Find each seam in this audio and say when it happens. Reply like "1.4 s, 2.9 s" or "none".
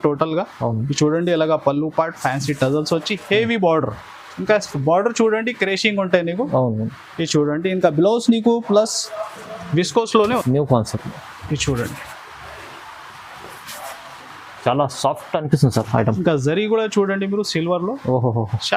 10.4 s